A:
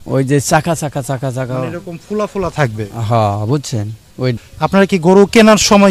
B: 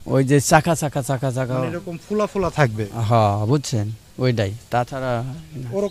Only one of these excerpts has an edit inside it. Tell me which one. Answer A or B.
A